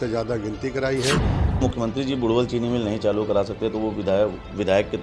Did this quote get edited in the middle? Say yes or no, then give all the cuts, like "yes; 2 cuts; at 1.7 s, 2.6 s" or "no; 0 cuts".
yes; 1 cut; at 1.6 s